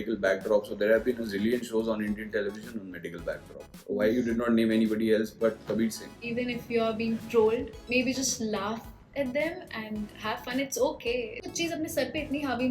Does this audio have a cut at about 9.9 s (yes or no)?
no